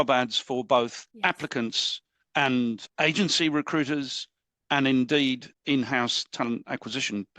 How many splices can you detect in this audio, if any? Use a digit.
3